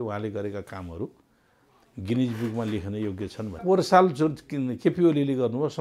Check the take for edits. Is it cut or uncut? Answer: cut